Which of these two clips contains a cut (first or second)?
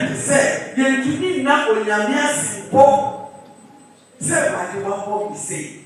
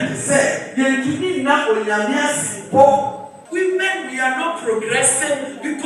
second